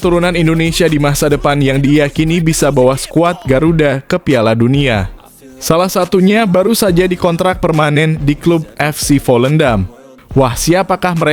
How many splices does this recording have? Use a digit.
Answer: 0